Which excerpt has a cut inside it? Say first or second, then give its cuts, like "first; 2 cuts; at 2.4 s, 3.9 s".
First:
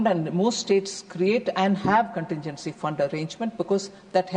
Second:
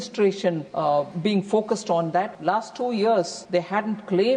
second; 3 cuts; at 0.9 s, 2.3 s, 3.4 s